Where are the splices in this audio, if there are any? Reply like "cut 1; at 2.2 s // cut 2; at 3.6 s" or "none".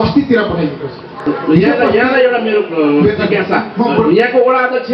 none